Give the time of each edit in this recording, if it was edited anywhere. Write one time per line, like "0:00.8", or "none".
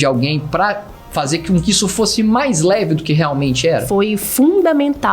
0:03.8